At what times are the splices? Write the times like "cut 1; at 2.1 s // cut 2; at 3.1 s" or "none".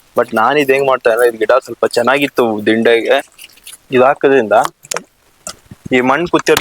cut 1; at 3.3 s